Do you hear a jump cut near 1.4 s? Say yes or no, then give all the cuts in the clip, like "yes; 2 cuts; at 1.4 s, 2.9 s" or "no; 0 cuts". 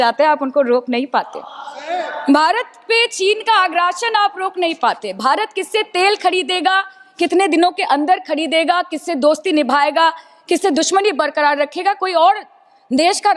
no; 0 cuts